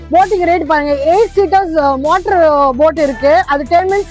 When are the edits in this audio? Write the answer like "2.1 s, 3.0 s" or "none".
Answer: none

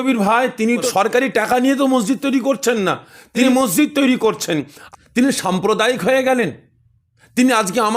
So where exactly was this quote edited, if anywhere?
0.9 s, 3.5 s, 4.8 s

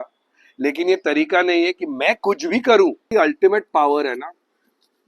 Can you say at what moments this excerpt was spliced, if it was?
3.1 s

